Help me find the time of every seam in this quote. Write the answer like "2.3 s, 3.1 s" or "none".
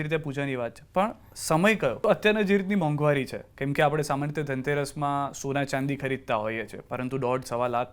2.0 s